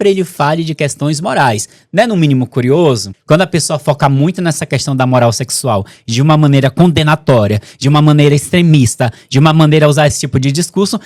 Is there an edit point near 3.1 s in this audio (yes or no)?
yes